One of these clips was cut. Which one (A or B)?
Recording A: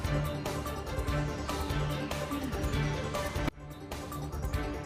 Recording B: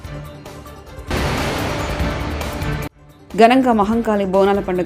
B